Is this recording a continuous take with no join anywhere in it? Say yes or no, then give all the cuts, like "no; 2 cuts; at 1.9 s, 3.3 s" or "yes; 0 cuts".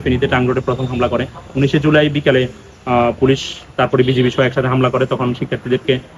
yes; 0 cuts